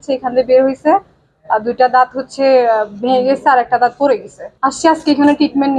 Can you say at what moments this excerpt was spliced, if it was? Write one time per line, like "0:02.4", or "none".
0:04.4

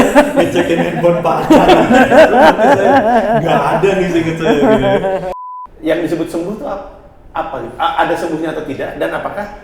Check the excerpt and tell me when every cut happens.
0:05.4

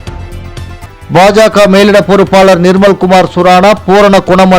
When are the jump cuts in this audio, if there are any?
0:01.0

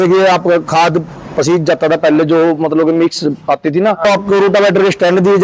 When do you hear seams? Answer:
0:04.0

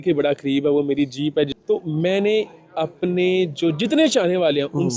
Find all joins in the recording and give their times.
0:01.6

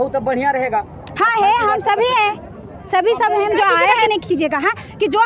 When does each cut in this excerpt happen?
0:04.1

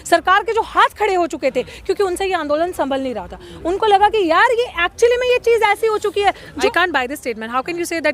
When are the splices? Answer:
0:06.5

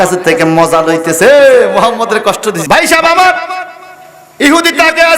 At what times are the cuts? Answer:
0:02.6

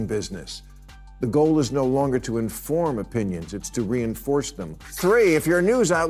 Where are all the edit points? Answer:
0:05.0

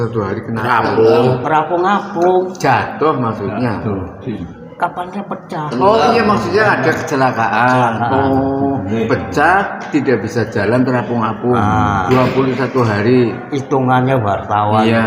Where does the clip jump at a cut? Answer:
none

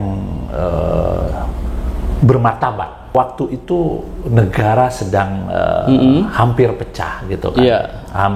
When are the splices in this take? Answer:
0:03.0

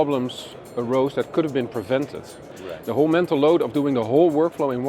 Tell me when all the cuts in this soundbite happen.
0:02.5

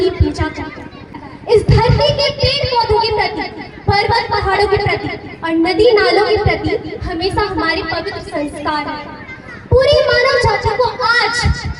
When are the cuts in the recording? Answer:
0:01.1

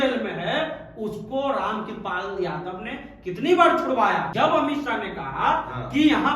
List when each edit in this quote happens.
0:04.3

